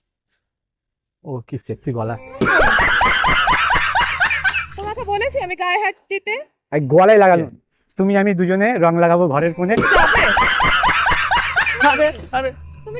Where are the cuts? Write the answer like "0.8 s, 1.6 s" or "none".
7.6 s